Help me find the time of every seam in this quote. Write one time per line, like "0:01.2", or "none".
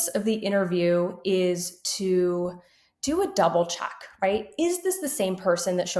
none